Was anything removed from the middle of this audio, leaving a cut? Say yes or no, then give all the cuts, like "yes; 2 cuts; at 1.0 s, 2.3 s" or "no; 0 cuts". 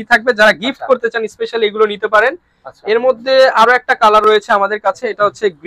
no; 0 cuts